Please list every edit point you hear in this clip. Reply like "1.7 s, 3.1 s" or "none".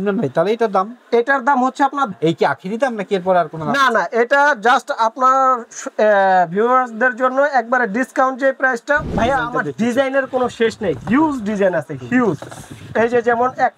2.1 s, 9.1 s